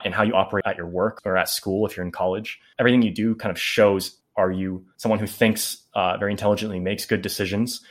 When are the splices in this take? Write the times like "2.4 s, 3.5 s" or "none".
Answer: 0.9 s, 2.6 s, 4.5 s

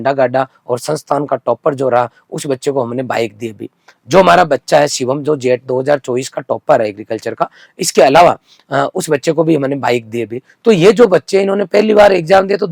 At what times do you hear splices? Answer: none

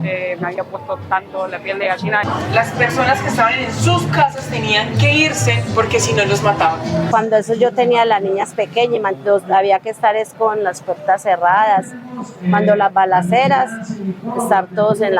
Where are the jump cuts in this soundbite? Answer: 2.2 s, 7.1 s

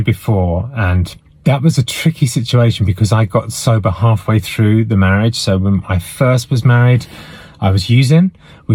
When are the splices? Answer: none

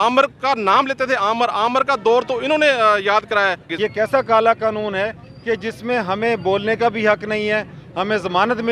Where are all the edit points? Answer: 3.6 s

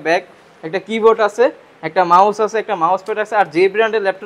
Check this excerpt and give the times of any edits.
none

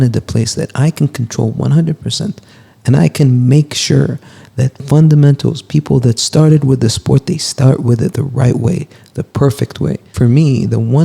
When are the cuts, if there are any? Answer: 10.1 s

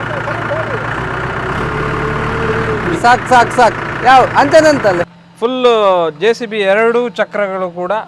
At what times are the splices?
5.1 s

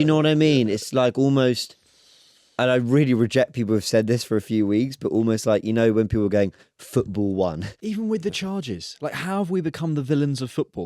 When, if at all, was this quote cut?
7.8 s

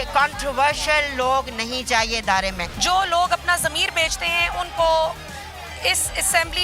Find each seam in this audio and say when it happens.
2.7 s

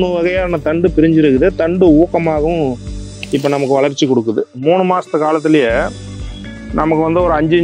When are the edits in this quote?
4.5 s

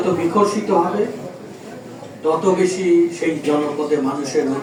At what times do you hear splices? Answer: none

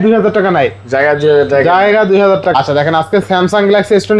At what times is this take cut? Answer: 2.5 s

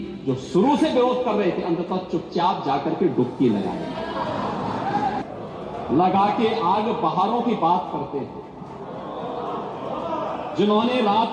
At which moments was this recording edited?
5.2 s

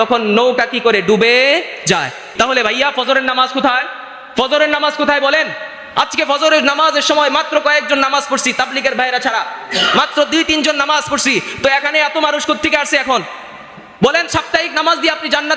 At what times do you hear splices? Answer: 2.3 s

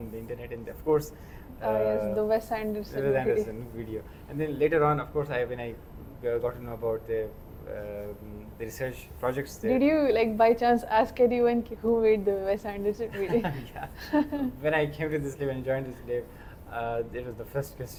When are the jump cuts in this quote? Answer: none

